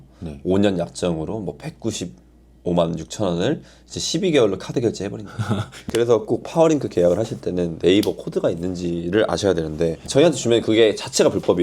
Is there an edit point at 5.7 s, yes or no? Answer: yes